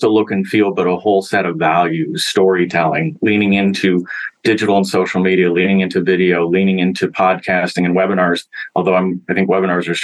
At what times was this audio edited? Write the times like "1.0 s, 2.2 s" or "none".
none